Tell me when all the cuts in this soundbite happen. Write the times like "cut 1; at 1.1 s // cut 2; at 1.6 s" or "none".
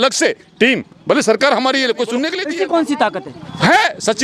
cut 1; at 2.4 s